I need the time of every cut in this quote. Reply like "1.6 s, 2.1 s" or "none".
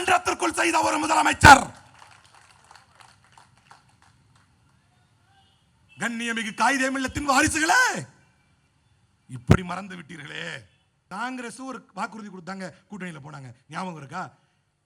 11.0 s